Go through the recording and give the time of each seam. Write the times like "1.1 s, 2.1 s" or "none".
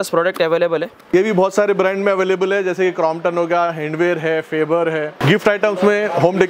1.0 s, 5.1 s